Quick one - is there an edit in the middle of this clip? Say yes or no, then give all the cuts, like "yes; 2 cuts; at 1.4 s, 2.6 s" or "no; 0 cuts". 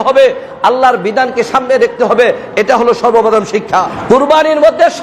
yes; 1 cut; at 3.9 s